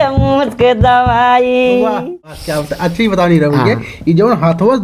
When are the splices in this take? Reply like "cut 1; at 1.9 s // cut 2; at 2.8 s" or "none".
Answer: cut 1; at 2.0 s